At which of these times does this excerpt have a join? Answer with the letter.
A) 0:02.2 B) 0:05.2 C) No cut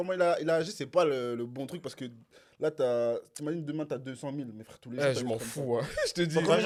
C